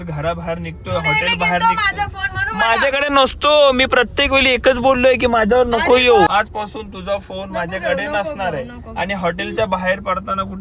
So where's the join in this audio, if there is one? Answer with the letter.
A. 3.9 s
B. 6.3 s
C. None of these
B